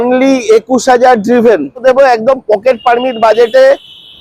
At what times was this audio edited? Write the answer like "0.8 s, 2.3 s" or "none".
1.8 s